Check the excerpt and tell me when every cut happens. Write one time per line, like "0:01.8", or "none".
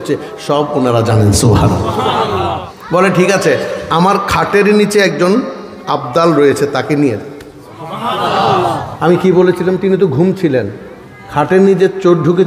0:02.7